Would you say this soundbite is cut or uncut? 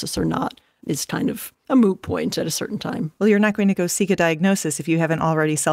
cut